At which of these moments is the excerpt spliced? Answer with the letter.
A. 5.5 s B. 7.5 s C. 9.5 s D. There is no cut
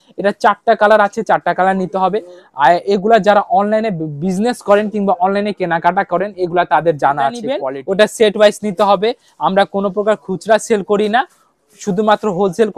B